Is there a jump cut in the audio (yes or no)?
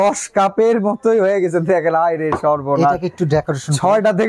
no